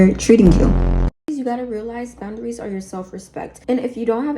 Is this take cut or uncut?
cut